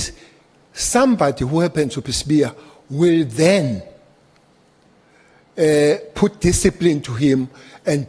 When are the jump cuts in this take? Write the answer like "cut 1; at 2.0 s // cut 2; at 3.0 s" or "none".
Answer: none

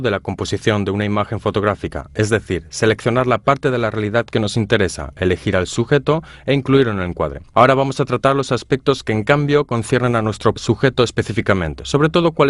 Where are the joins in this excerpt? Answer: none

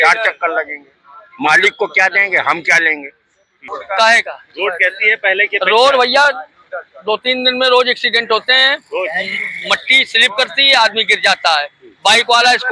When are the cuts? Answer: cut 1; at 3.7 s

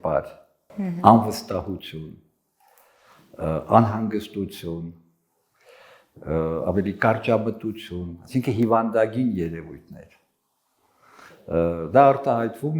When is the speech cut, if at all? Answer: none

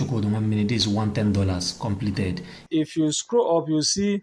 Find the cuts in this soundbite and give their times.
cut 1; at 2.5 s

